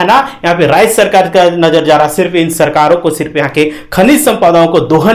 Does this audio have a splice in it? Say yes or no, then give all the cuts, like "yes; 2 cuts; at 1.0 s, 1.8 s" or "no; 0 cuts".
no; 0 cuts